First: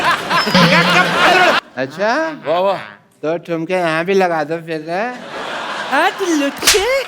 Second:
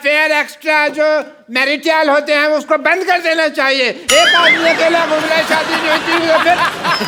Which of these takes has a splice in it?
first; 1 cut; at 1.6 s

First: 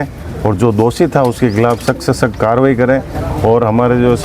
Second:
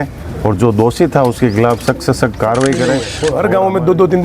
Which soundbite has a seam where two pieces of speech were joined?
second; 1 cut; at 3.1 s

